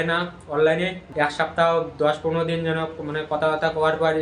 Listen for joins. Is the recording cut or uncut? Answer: cut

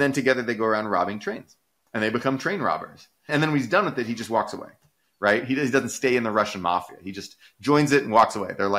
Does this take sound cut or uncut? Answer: cut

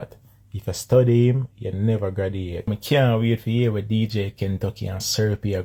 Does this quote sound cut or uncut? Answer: uncut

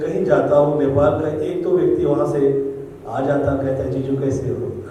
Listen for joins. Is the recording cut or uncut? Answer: uncut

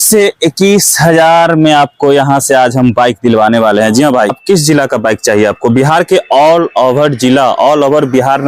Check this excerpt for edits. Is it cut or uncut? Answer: cut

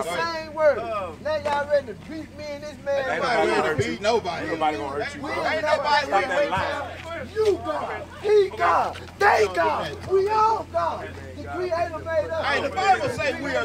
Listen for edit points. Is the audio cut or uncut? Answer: cut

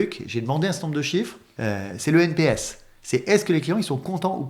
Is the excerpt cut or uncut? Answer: cut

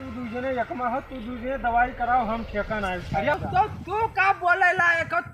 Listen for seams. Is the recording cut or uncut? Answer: cut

